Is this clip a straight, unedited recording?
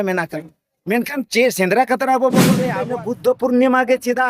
no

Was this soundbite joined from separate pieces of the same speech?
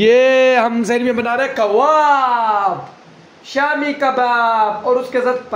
no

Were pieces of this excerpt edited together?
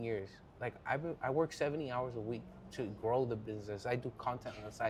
no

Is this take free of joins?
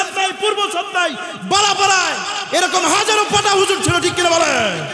yes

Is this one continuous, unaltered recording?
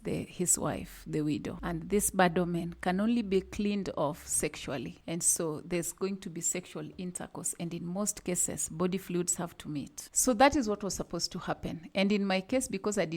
no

